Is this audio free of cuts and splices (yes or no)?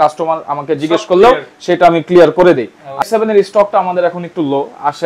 no